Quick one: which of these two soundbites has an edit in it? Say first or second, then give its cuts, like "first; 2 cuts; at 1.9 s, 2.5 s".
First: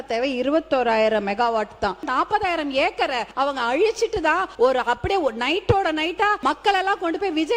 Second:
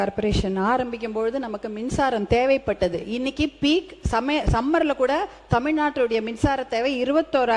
first; 4 cuts; at 2.1 s, 3.3 s, 4.5 s, 6.4 s